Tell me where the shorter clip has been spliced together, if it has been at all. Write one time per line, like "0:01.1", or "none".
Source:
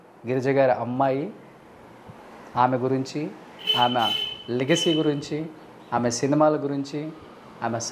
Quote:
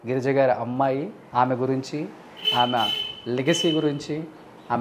0:01.2